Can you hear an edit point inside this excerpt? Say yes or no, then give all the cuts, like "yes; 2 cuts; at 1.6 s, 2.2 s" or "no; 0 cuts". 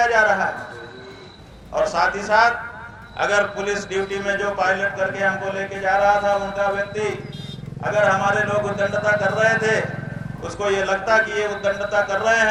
no; 0 cuts